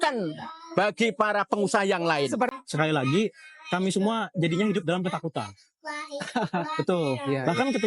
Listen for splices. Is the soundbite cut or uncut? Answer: cut